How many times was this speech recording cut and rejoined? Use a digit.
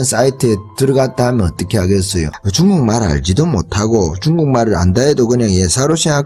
0